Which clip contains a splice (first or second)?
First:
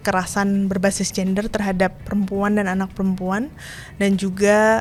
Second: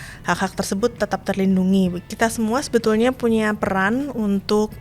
second